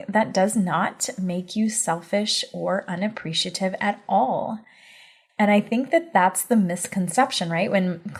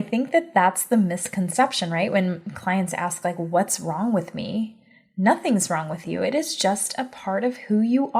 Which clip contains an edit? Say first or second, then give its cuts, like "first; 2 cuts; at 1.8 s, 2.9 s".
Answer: second; 1 cut; at 6.1 s